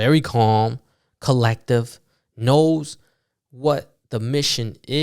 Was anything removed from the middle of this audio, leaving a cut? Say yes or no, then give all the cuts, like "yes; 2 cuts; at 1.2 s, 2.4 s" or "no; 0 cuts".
no; 0 cuts